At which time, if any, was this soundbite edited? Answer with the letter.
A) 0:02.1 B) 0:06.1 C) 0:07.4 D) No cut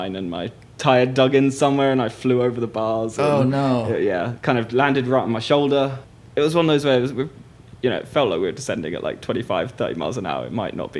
B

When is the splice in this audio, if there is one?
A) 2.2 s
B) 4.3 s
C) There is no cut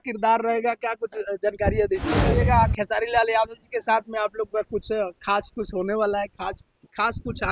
A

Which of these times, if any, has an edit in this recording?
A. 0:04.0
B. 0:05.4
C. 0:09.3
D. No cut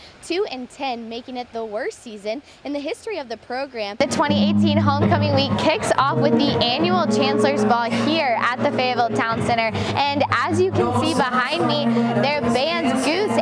A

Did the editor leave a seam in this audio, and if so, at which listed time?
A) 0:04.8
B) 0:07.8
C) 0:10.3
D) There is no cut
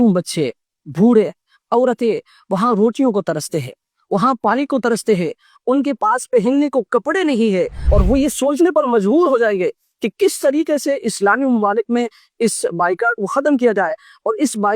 B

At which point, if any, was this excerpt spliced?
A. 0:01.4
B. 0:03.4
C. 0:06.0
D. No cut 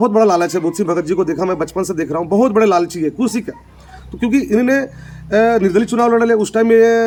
D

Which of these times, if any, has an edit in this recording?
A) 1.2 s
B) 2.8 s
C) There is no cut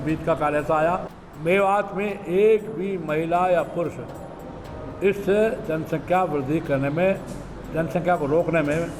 A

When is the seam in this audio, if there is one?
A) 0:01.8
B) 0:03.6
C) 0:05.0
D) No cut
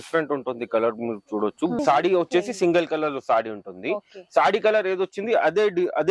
A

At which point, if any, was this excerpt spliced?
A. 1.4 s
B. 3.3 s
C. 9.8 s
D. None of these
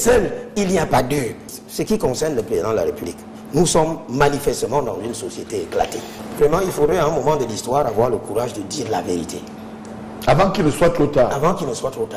A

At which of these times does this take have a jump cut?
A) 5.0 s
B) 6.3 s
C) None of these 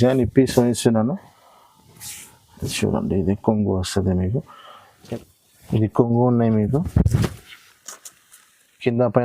A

